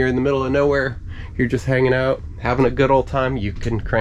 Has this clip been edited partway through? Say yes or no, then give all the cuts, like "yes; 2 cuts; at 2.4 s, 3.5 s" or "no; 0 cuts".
no; 0 cuts